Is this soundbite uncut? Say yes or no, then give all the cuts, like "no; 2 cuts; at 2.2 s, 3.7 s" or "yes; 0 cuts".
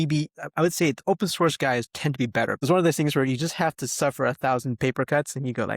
no; 1 cut; at 2.6 s